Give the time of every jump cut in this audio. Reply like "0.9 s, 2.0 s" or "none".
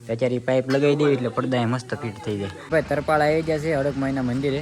2.6 s

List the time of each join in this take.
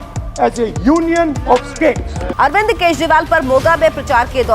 2.2 s

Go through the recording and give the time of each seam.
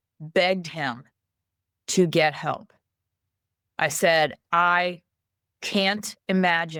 none

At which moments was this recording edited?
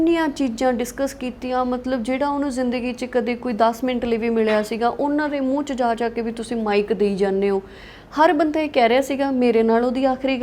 none

